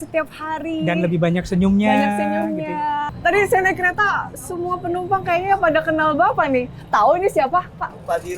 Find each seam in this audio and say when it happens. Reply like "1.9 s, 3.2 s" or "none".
3.1 s

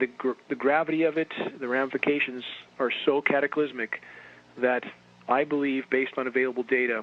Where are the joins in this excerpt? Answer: none

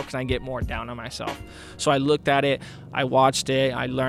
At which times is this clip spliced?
none

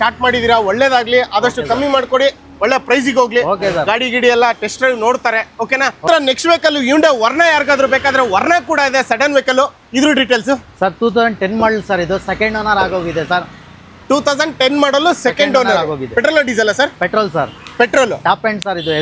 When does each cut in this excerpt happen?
none

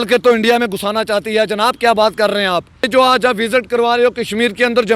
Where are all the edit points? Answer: 2.9 s

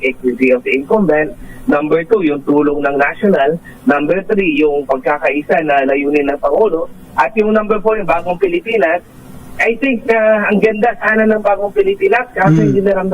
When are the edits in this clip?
none

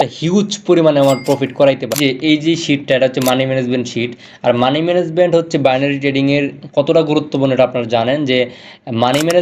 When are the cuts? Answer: 2.0 s

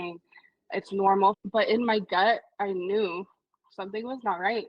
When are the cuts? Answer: 1.4 s

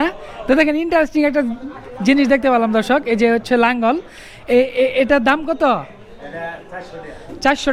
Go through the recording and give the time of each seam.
none

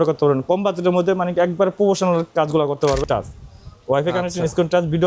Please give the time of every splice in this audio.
3.0 s

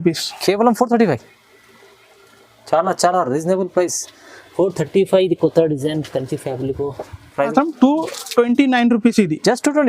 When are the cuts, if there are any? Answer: 7.5 s

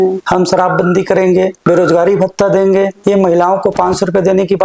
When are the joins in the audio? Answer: 1.6 s, 2.9 s

